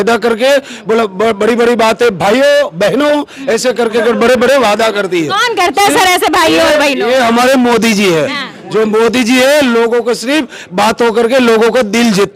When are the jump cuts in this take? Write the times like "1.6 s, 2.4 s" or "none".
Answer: none